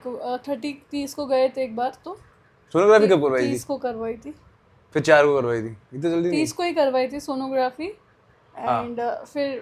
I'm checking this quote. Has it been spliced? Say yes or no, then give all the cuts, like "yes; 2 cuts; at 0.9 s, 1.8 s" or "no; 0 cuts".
no; 0 cuts